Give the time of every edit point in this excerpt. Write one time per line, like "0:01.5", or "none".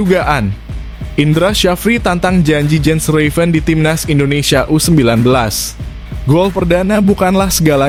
none